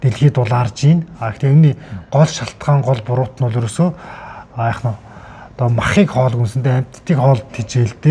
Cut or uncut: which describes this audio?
uncut